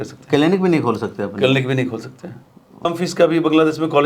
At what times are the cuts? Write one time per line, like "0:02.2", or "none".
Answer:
0:02.9